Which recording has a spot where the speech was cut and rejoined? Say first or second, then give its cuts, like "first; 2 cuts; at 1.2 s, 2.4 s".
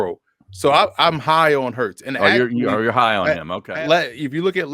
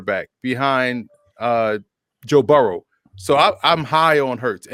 first; 1 cut; at 3.6 s